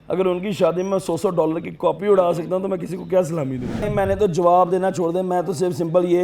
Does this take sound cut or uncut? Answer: cut